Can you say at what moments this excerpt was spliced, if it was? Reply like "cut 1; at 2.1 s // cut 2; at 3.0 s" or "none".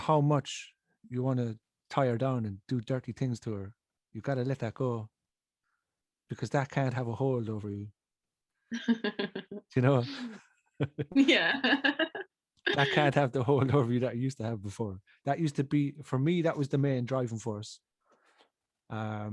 none